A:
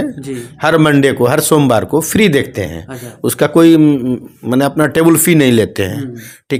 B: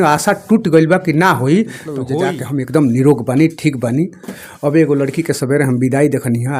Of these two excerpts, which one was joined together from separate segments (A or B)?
B